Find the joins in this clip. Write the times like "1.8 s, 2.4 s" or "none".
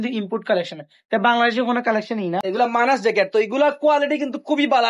2.5 s